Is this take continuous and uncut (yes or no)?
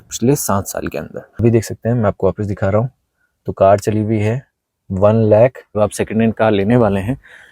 no